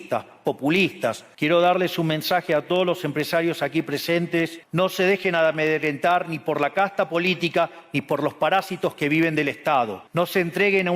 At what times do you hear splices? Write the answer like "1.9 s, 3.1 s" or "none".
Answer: 1.3 s, 4.6 s, 10.0 s

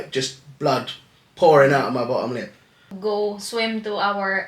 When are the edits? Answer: 2.9 s

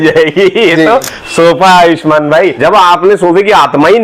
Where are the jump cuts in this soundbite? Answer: 2.6 s

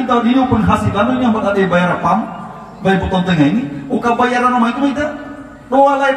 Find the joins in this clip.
none

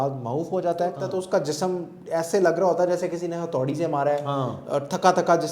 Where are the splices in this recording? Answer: 1.1 s

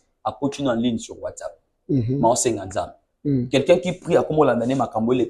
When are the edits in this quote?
none

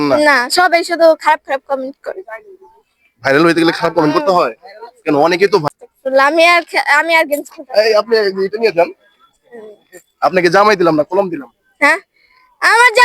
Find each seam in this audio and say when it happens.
5.6 s

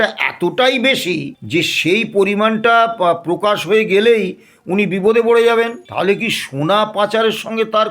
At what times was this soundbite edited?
1.3 s, 5.8 s

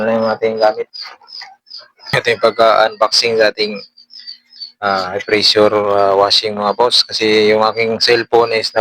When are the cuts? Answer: 2.1 s

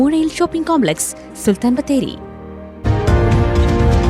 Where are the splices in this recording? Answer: 2.6 s

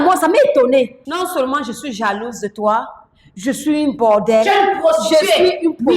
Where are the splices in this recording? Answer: 1.0 s

